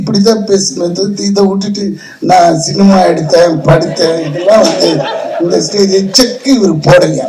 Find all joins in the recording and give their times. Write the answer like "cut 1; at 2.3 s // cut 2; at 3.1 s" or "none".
none